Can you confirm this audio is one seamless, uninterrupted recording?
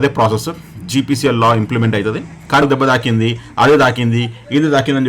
no; 1 cut; at 2.6 s

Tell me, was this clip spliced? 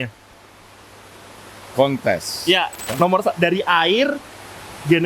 yes; 1 cut; at 2.9 s

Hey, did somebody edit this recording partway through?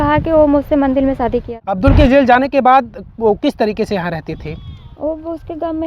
yes; 1 cut; at 1.6 s

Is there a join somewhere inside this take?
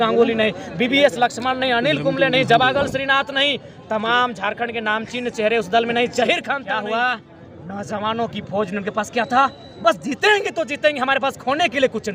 yes; 1 cut; at 6.6 s

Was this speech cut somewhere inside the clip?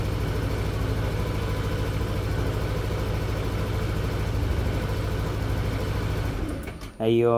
no; 0 cuts

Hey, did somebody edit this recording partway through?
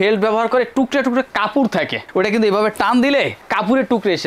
no; 0 cuts

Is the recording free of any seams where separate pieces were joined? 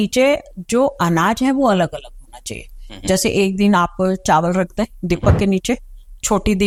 yes; 0 cuts

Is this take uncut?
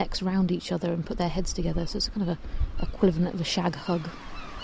yes; 0 cuts

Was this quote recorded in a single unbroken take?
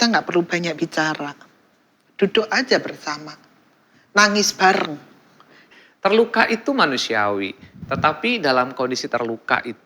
no; 1 cut; at 5.7 s

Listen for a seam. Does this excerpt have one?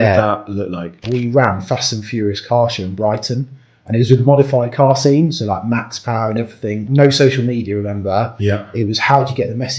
yes; 2 cuts; at 1.0 s, 6.8 s

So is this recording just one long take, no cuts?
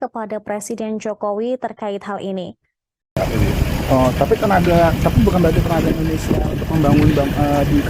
no; 1 cut; at 3.1 s

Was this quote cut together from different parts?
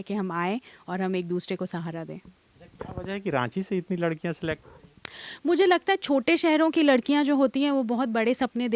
no; 0 cuts

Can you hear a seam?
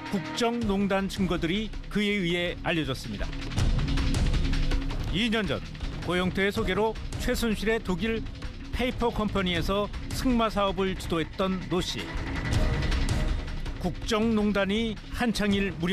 no; 0 cuts

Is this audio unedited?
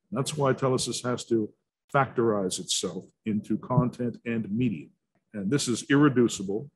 no; 1 cut; at 5.2 s

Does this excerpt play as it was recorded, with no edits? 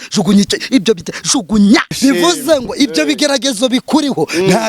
no; 1 cut; at 1.9 s

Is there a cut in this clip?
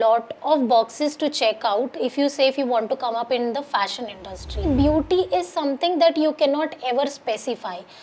yes; 1 cut; at 4.6 s

